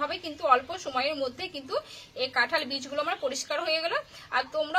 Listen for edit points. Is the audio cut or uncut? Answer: uncut